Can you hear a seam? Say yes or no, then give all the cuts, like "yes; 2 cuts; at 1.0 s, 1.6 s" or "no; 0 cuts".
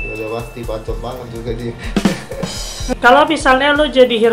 yes; 1 cut; at 2.9 s